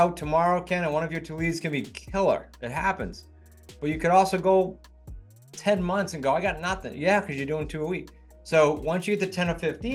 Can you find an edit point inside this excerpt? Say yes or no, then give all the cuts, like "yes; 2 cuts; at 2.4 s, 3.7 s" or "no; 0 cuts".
no; 0 cuts